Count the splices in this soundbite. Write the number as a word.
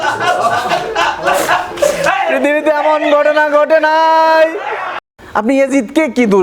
one